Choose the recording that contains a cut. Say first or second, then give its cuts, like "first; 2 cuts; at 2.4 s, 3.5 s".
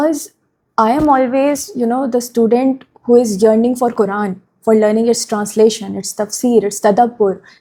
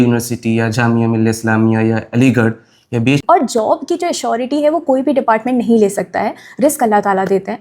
second; 1 cut; at 3.2 s